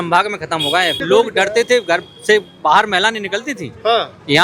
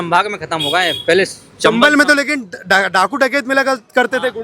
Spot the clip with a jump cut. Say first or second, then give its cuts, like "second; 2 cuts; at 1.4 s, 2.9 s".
first; 1 cut; at 1.0 s